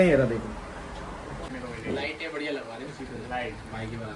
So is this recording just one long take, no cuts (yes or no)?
no